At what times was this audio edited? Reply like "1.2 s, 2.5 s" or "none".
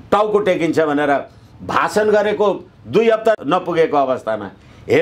3.4 s